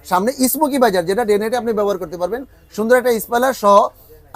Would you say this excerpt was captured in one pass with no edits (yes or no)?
yes